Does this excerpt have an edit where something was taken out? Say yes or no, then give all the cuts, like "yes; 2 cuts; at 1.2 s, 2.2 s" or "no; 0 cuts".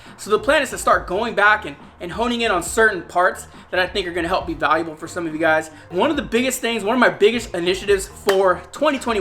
yes; 1 cut; at 5.9 s